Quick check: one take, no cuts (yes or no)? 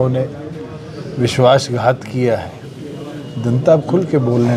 yes